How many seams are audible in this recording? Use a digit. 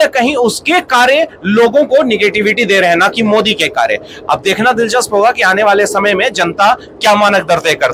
0